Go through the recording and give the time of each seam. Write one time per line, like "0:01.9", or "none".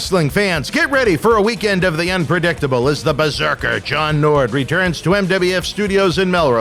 none